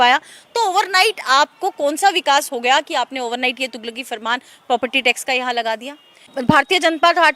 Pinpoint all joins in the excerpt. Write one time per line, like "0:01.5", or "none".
0:06.3